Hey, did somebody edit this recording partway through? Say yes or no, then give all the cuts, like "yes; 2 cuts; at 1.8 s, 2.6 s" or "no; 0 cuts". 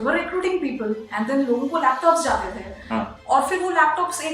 no; 0 cuts